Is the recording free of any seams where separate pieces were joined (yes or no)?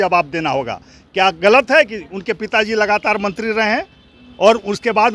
yes